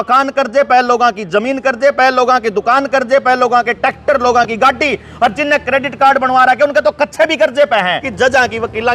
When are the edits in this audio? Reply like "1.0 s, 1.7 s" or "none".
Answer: 8.0 s